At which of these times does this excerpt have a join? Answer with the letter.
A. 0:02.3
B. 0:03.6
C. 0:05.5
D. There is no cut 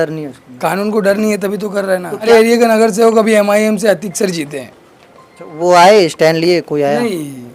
A